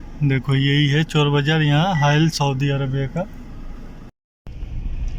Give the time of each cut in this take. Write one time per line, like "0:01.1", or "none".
0:04.1